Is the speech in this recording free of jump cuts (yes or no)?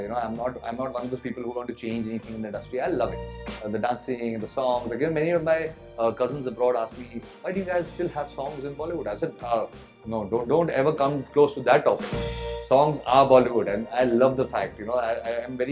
yes